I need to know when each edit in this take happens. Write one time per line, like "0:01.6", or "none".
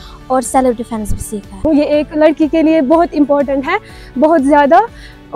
0:01.6